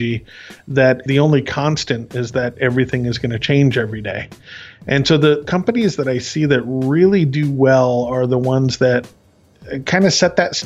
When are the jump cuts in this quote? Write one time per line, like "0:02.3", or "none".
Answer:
0:01.0
0:05.5